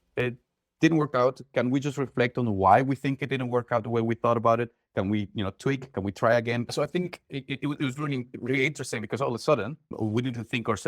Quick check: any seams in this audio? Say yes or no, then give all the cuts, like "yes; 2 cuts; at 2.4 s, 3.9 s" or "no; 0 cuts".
yes; 1 cut; at 6.7 s